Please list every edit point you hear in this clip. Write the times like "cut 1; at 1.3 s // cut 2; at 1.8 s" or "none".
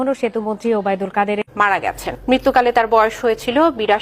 cut 1; at 2.1 s